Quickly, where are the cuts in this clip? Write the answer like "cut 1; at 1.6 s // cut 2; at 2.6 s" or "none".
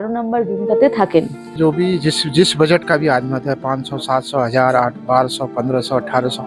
cut 1; at 1.5 s